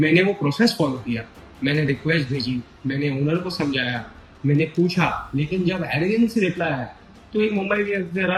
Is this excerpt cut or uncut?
uncut